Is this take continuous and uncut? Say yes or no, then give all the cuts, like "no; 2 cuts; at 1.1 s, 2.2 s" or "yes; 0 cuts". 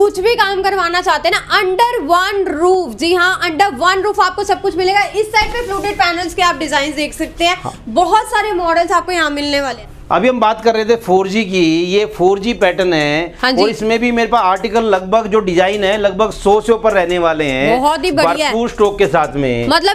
yes; 0 cuts